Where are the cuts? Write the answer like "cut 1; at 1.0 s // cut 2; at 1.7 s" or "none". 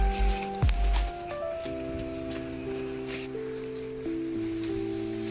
none